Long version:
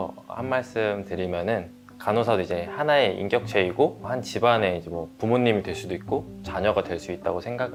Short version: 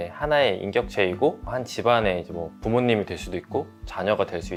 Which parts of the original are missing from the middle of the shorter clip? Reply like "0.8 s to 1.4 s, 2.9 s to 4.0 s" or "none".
none